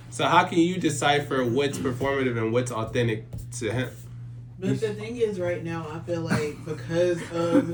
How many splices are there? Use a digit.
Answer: 0